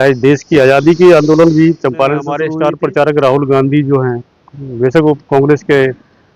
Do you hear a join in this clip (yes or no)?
yes